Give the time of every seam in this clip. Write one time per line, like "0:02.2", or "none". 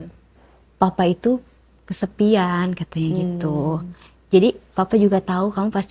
none